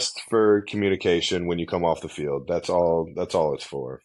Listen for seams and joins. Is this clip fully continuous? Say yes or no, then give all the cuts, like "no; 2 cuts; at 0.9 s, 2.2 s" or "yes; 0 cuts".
yes; 0 cuts